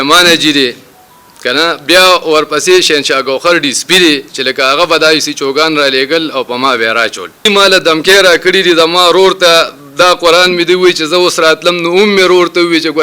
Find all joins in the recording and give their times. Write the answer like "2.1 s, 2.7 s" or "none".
7.4 s